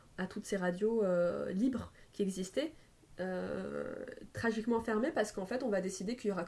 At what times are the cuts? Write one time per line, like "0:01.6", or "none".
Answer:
none